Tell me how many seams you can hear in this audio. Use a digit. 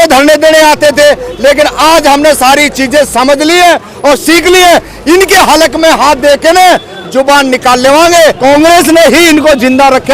1